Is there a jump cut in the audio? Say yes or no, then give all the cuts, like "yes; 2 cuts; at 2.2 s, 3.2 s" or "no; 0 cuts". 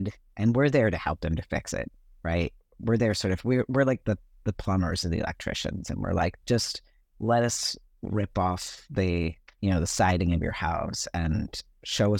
no; 0 cuts